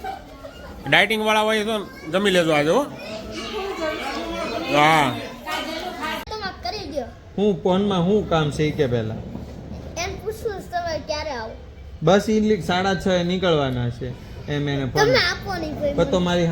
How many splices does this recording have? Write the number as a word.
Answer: one